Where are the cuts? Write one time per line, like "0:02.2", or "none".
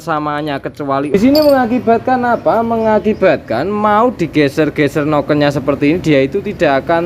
0:01.1